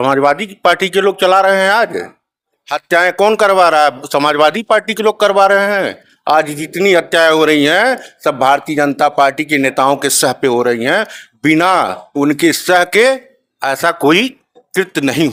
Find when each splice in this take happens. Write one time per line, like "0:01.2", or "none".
none